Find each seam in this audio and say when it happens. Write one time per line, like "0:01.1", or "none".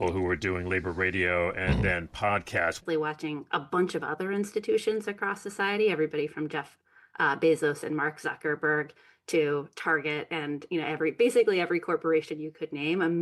0:02.8